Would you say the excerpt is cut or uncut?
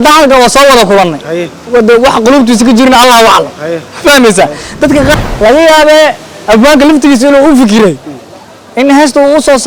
cut